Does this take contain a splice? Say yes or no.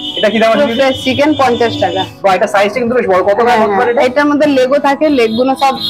no